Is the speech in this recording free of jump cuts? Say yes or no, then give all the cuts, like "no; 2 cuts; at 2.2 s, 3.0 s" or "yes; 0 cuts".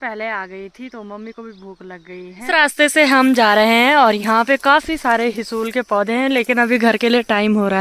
no; 1 cut; at 2.5 s